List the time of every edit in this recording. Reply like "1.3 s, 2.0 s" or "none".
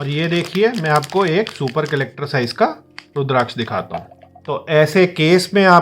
4.4 s